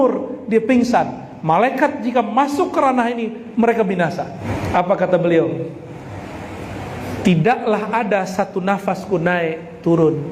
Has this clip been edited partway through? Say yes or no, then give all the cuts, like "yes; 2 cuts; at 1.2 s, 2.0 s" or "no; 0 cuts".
yes; 1 cut; at 4.4 s